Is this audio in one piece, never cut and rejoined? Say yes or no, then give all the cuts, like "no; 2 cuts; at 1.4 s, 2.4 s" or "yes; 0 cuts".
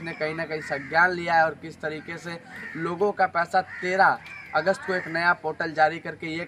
yes; 0 cuts